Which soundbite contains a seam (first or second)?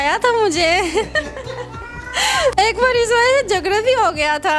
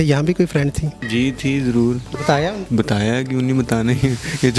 second